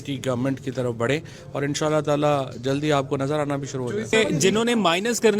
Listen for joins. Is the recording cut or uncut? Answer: cut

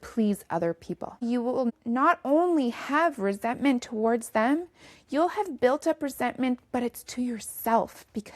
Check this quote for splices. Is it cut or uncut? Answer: cut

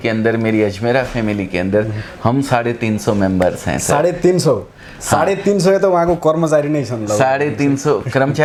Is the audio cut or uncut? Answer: uncut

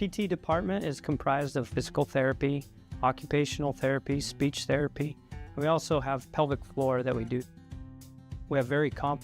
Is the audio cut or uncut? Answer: cut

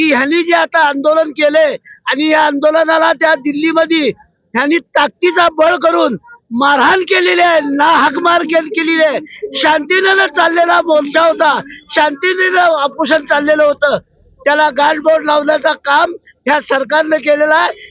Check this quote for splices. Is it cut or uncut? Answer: uncut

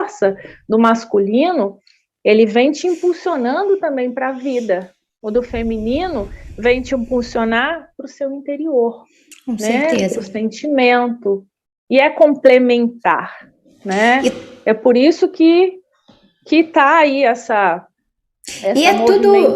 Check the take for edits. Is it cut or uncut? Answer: uncut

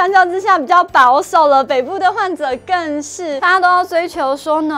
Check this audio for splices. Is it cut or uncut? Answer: cut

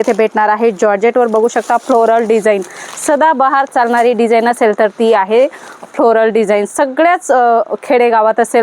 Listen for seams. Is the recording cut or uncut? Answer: uncut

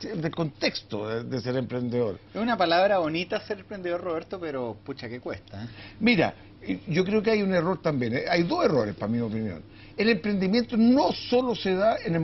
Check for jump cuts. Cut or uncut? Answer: cut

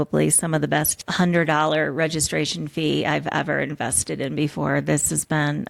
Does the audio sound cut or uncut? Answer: cut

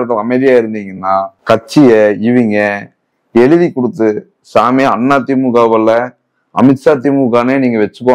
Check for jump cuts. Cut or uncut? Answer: uncut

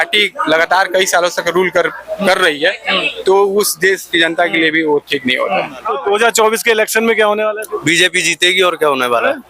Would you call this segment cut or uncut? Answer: cut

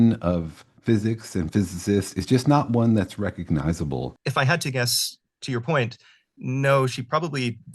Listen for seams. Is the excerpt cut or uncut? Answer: cut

